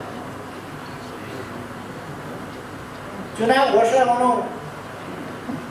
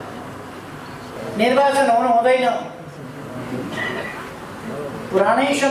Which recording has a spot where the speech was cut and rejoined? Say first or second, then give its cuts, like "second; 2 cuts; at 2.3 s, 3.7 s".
second; 1 cut; at 1.2 s